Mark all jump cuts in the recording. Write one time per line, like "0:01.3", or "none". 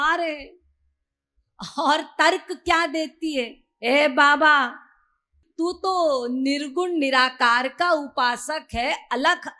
0:05.4